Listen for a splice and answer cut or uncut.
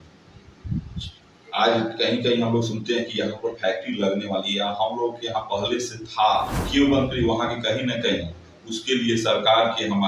cut